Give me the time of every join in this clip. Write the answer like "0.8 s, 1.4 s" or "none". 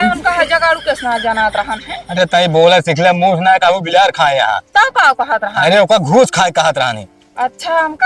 none

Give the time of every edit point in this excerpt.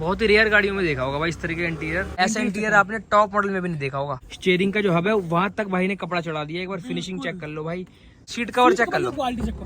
2.1 s, 4.3 s, 8.3 s

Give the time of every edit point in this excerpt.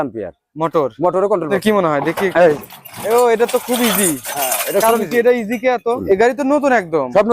1.5 s, 6.0 s

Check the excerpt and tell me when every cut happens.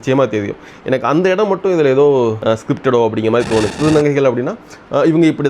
2.4 s, 3.7 s

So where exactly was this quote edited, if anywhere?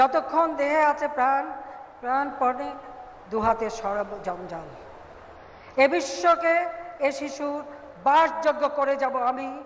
none

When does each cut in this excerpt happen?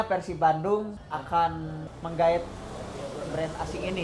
1.0 s, 1.9 s

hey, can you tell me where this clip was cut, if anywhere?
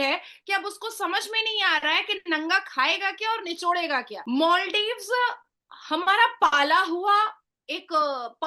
4.1 s

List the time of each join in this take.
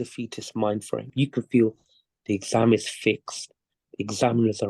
1.1 s

